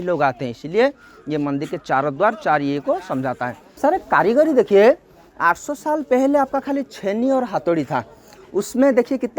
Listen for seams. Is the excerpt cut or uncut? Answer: cut